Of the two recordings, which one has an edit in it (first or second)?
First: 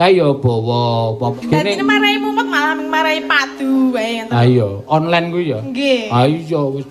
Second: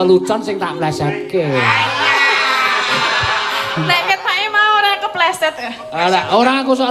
first